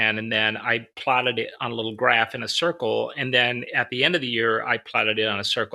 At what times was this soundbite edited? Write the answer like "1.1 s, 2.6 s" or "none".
0.9 s